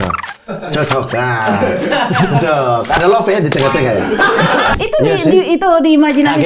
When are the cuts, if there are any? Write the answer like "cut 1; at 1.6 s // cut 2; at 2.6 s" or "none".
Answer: cut 1; at 4.7 s